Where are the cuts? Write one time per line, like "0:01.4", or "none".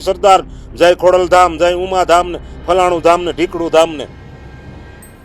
0:04.4